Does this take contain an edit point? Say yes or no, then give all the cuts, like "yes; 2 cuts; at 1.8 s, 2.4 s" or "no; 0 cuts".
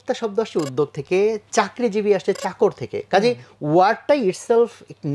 no; 0 cuts